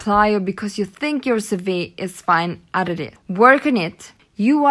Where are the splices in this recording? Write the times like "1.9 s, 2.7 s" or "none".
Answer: 3.2 s